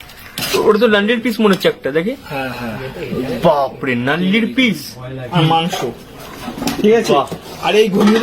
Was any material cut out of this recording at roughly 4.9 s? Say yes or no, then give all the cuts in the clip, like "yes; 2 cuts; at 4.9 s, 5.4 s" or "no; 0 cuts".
yes; 1 cut; at 4.9 s